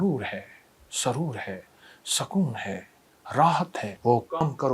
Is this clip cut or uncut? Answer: cut